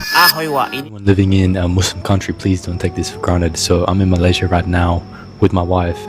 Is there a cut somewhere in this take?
yes; 1 cut; at 1.0 s

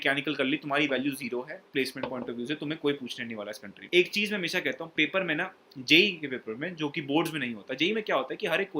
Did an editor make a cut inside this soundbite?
yes; 1 cut; at 3.8 s

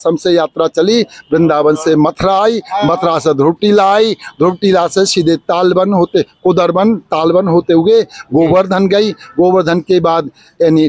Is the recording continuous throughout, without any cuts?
yes; 0 cuts

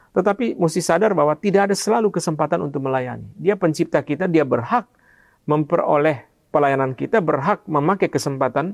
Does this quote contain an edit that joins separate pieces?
no; 0 cuts

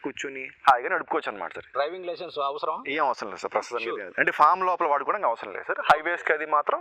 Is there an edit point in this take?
yes; 1 cut; at 1.7 s

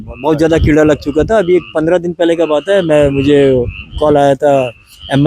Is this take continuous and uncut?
yes; 0 cuts

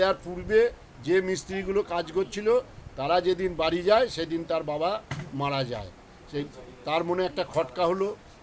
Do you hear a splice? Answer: no; 0 cuts

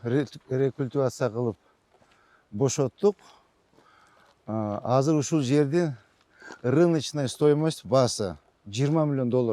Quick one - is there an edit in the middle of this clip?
no; 0 cuts

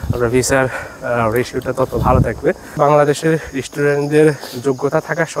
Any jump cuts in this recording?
yes; 1 cut; at 2.8 s

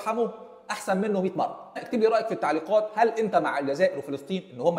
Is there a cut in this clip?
yes; 1 cut; at 1.7 s

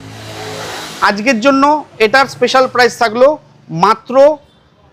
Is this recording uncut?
yes; 0 cuts

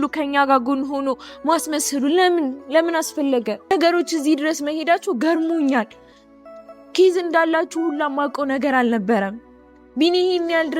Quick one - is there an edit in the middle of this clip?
yes; 1 cut; at 3.7 s

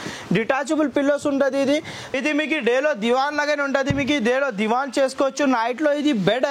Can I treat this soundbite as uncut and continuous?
no; 1 cut; at 2.2 s

